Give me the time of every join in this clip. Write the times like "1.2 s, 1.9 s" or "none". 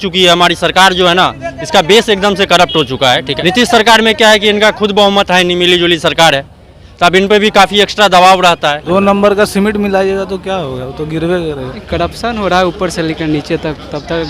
3.3 s, 8.8 s, 11.8 s